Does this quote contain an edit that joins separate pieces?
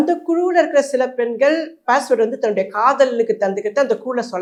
no; 0 cuts

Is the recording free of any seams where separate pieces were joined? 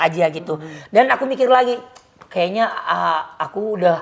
yes; 0 cuts

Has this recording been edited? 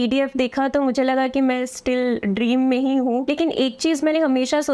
yes; 1 cut; at 3.2 s

